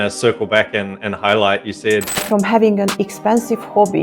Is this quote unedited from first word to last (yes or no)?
no